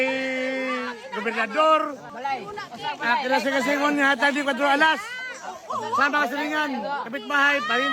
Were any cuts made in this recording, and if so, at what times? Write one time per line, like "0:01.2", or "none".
0:02.1